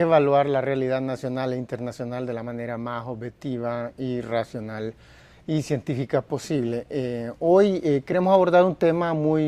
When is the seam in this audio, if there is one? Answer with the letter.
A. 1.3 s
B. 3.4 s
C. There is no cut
A